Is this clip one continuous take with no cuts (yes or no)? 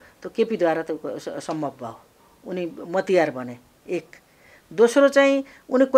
yes